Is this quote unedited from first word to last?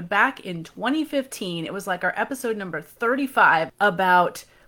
no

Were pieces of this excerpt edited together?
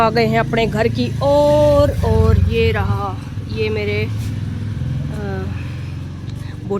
no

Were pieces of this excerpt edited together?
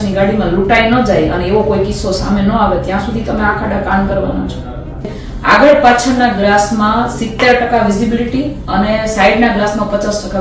yes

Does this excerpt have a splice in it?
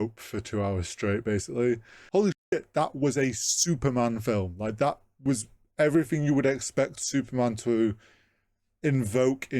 yes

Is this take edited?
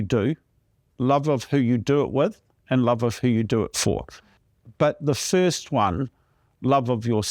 yes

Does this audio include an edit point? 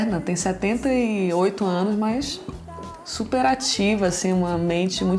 no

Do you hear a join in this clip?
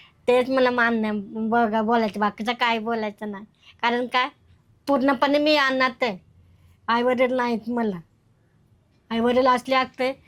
no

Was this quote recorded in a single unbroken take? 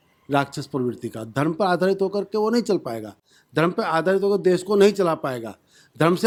yes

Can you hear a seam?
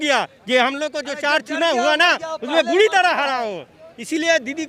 no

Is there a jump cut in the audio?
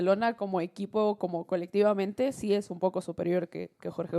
no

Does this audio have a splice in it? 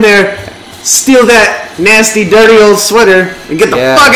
no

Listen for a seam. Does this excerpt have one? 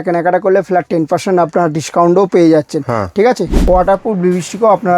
yes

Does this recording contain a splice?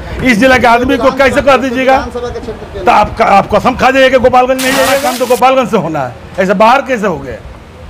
yes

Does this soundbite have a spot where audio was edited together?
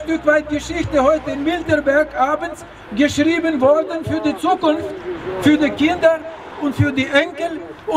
no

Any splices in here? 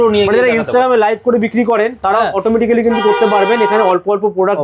no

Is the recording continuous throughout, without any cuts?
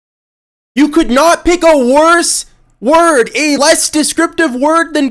no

